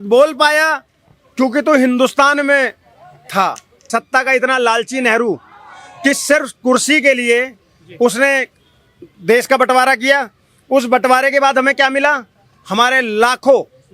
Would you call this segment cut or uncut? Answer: cut